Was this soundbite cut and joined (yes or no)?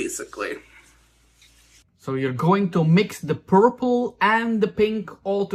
no